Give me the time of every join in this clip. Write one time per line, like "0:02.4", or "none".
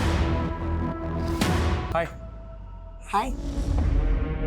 0:01.9